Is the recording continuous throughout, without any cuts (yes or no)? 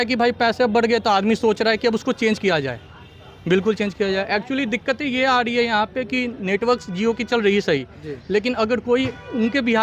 yes